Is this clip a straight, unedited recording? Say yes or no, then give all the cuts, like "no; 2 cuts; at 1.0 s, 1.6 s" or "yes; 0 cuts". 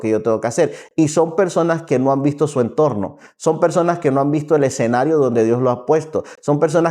yes; 0 cuts